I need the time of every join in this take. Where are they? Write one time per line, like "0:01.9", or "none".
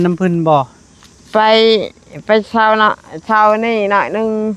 none